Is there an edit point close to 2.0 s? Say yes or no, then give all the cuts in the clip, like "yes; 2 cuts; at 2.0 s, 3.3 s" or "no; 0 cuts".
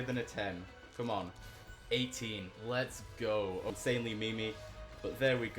no; 1 cut; at 3.7 s